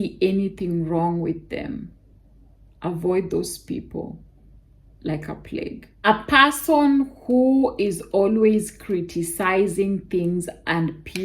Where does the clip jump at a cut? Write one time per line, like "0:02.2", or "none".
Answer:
0:06.1